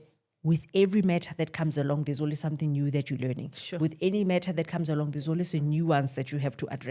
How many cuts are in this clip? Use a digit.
0